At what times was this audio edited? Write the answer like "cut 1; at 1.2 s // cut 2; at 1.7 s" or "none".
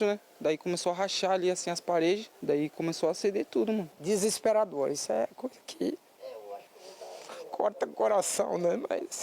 cut 1; at 2.3 s // cut 2; at 3.9 s